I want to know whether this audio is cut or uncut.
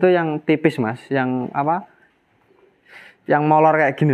uncut